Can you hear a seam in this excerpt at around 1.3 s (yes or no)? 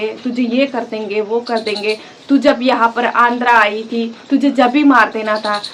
no